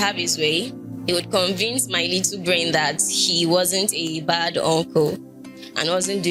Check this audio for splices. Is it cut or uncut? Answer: uncut